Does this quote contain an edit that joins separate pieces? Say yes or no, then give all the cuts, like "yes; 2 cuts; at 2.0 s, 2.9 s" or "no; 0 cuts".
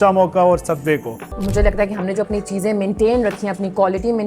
yes; 1 cut; at 1.4 s